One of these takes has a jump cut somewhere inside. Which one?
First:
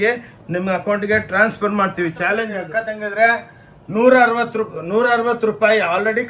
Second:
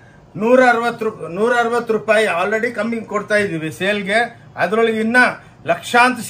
first; 1 cut; at 2.6 s

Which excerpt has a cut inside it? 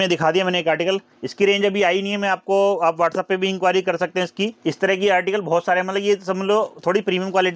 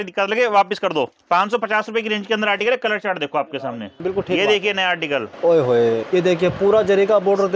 second; 4 cuts; at 1.2 s, 3.9 s, 5.3 s, 6.0 s

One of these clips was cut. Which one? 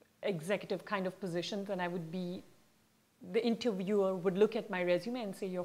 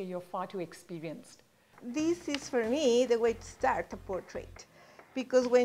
second; 1 cut; at 1.8 s

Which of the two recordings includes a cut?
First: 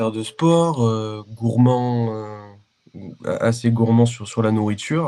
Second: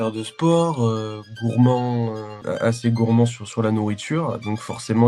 second; 1 cut; at 2.3 s

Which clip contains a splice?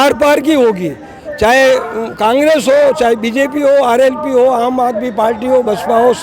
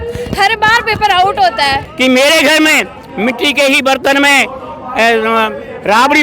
second; 1 cut; at 1.9 s

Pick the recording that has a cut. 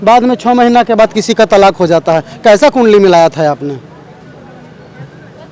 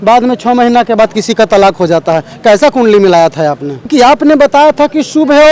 second; 1 cut; at 3.9 s

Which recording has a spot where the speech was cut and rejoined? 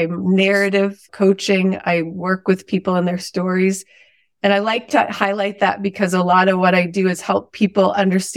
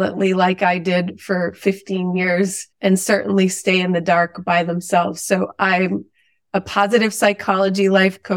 first; 1 cut; at 1.0 s

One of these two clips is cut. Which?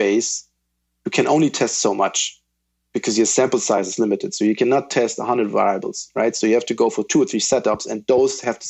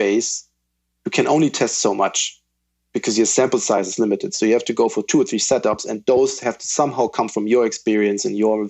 second; 1 cut; at 4.3 s

